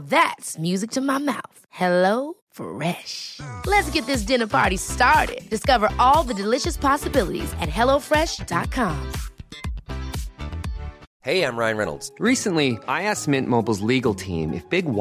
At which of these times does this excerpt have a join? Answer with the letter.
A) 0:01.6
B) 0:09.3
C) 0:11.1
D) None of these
C